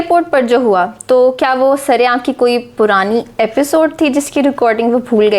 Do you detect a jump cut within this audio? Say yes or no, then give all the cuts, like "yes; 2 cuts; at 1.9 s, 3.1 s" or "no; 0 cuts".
no; 0 cuts